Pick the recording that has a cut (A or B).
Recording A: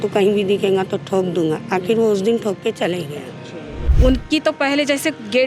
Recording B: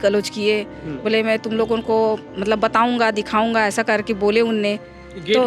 A